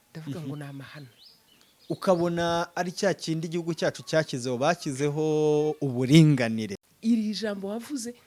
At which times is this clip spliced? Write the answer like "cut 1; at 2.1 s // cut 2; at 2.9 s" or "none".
cut 1; at 6.8 s